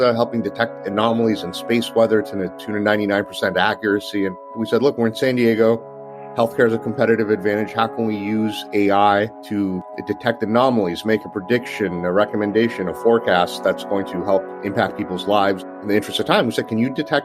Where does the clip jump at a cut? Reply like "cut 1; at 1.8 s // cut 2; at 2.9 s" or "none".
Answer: cut 1; at 4.5 s // cut 2; at 9.8 s // cut 3; at 14.5 s // cut 4; at 15.7 s